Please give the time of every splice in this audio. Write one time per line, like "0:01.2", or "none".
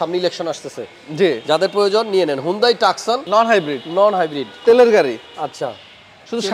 0:03.2